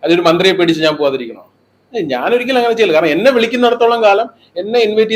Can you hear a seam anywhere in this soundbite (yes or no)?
no